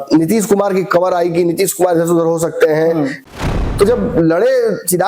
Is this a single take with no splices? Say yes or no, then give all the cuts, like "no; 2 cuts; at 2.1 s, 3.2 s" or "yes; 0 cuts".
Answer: no; 1 cut; at 3.2 s